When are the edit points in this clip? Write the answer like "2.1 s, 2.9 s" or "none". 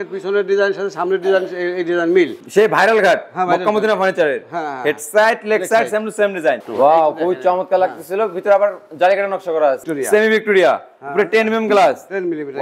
2.4 s, 6.6 s, 9.9 s